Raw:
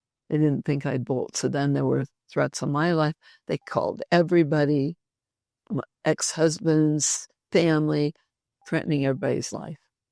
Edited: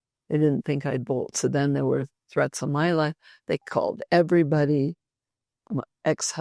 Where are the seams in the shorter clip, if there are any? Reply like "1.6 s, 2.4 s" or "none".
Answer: none